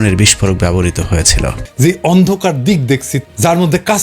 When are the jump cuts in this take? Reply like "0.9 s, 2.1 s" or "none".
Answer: 1.6 s

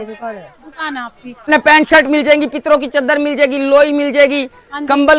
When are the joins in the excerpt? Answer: 1.5 s

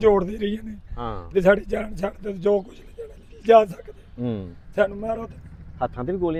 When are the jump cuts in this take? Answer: none

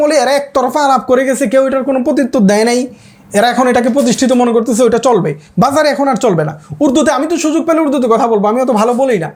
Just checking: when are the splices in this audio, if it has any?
none

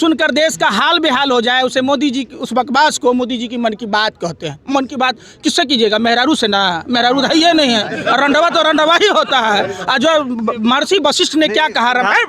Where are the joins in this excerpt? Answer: none

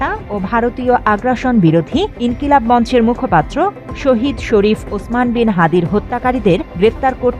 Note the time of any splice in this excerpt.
none

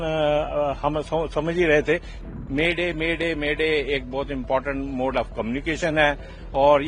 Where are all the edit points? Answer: 2.2 s

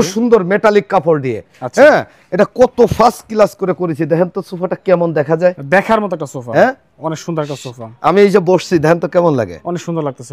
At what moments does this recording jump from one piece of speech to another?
none

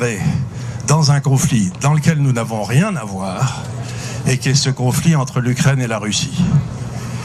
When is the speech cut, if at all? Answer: none

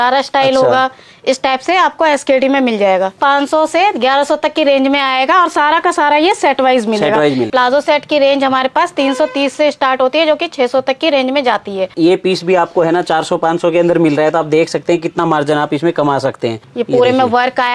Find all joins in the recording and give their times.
3.2 s, 7.5 s, 11.9 s, 16.7 s

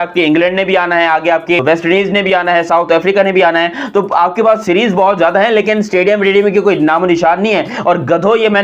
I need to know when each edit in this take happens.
1.6 s

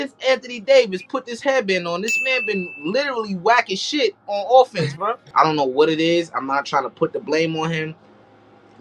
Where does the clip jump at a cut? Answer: 5.3 s

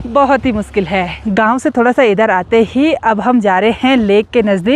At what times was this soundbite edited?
none

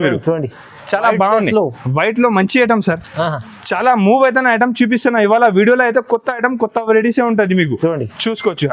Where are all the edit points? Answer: none

